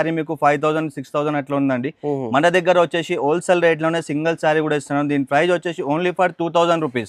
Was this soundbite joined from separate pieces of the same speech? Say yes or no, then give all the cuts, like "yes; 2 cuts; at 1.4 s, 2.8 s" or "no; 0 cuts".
no; 0 cuts